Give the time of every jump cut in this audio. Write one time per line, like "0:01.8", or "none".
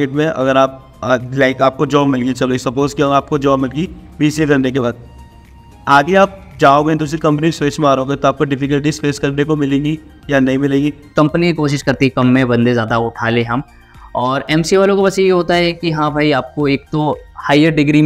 0:11.1